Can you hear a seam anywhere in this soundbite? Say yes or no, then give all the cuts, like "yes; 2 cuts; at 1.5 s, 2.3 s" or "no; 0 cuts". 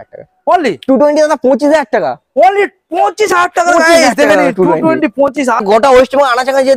yes; 1 cut; at 5.6 s